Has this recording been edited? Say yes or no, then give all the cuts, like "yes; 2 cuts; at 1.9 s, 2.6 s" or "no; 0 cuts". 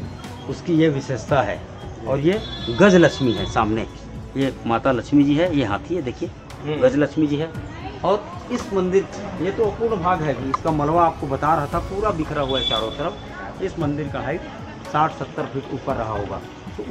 no; 0 cuts